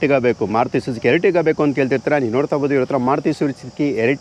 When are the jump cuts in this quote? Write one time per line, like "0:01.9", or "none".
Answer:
none